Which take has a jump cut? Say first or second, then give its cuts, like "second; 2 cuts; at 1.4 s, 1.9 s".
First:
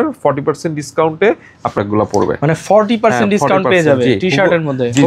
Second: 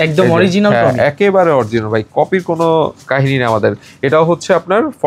first; 1 cut; at 1.8 s